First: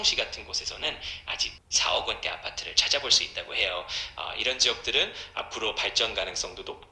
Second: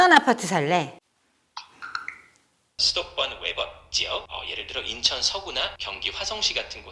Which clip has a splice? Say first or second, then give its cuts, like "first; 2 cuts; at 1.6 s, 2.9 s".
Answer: second; 1 cut; at 2.8 s